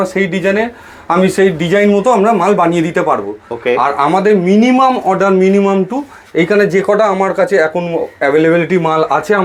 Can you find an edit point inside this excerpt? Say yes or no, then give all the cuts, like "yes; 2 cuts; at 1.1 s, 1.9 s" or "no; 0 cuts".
no; 0 cuts